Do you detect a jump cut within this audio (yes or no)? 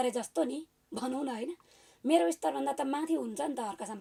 no